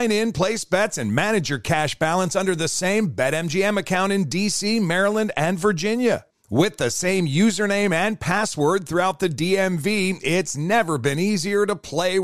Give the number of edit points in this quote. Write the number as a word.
zero